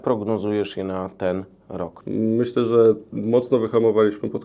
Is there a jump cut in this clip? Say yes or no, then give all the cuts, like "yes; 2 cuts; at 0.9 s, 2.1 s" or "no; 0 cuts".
no; 0 cuts